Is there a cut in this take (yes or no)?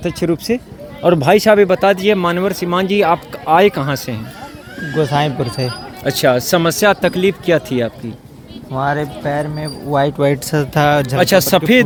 no